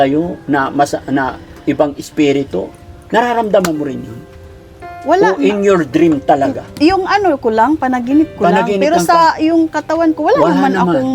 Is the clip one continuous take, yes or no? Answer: yes